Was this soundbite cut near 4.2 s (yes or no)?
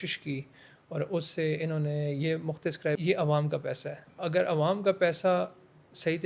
yes